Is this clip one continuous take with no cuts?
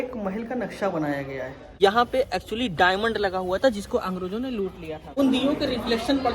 no; 2 cuts; at 1.6 s, 5.1 s

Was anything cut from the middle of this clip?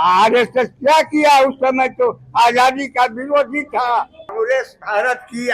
yes; 1 cut; at 4.3 s

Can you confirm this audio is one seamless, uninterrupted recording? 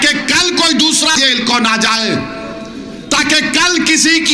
no; 1 cut; at 1.1 s

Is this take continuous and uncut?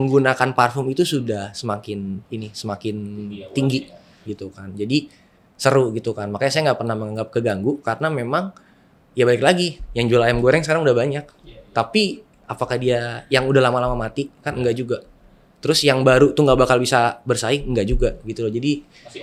yes; 0 cuts

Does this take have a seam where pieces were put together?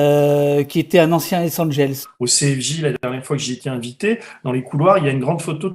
yes; 1 cut; at 2.1 s

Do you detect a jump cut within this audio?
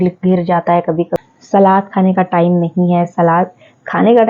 yes; 1 cut; at 1.1 s

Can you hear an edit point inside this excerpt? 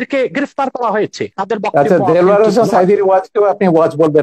yes; 1 cut; at 1.3 s

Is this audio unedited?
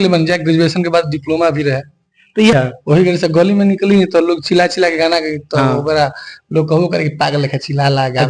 no; 1 cut; at 2.5 s

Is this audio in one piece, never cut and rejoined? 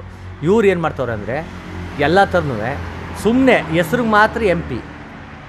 yes; 0 cuts

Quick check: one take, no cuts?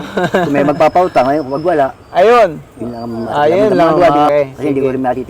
no; 1 cut; at 4.3 s

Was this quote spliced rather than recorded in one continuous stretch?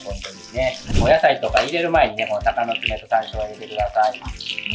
yes; 1 cut; at 0.9 s

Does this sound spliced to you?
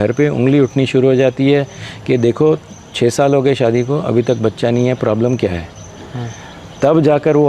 no; 0 cuts

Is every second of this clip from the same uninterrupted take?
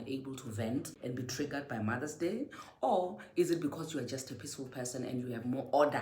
no; 1 cut; at 0.9 s

